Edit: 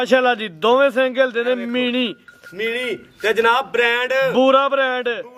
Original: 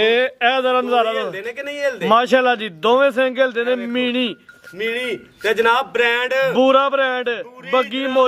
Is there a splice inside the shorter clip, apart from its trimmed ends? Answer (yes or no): no